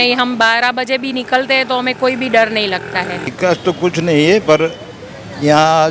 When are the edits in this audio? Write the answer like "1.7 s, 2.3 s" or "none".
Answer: 3.3 s